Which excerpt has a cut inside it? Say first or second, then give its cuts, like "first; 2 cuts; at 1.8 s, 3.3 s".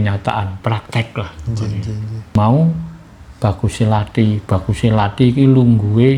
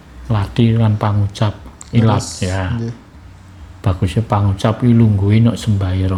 first; 1 cut; at 2.4 s